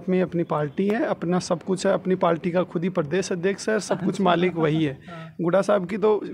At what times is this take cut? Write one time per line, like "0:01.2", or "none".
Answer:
none